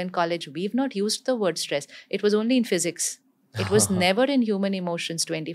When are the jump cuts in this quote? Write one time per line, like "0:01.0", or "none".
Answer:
none